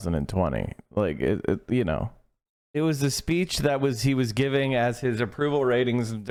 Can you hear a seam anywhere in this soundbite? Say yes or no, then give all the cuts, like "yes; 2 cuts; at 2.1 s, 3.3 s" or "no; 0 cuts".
no; 0 cuts